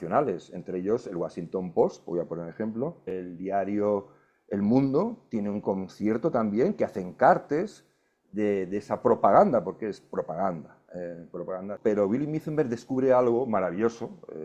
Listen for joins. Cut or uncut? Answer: cut